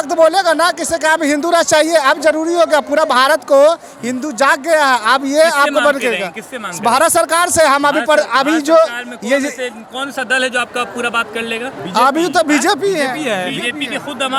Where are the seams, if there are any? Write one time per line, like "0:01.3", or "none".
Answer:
none